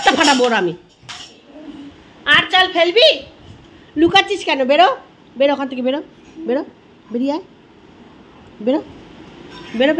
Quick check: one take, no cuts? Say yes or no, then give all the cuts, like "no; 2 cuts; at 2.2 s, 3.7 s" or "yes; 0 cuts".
no; 1 cut; at 1.5 s